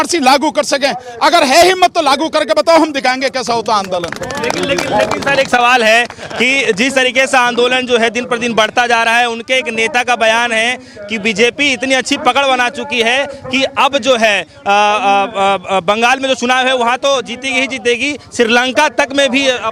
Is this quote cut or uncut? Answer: uncut